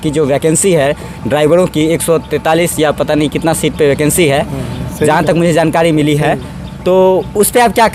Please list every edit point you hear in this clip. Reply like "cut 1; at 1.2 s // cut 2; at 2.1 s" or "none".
none

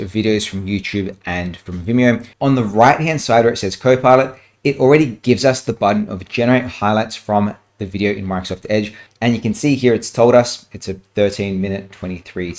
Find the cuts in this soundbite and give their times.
cut 1; at 2.3 s // cut 2; at 9.0 s

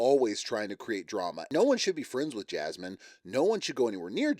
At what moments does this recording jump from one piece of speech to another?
cut 1; at 1.4 s

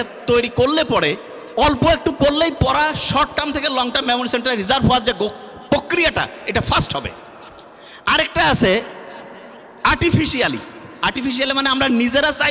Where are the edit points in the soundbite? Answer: none

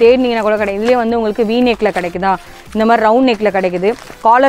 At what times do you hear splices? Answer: none

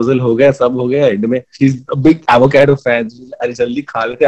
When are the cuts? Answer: cut 1; at 1.5 s

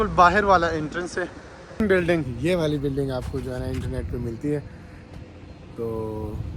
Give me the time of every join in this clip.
cut 1; at 1.8 s

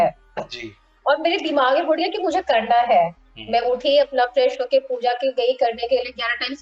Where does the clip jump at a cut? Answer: none

